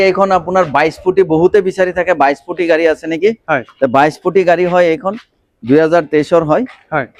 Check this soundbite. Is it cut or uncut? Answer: uncut